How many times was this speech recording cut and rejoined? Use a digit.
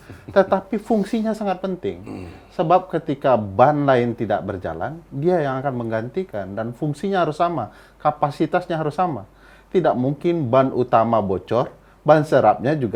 0